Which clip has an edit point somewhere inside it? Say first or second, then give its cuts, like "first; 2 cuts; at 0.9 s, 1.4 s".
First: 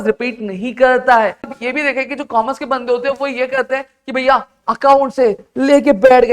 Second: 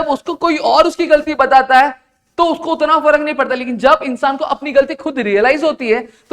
first; 1 cut; at 1.6 s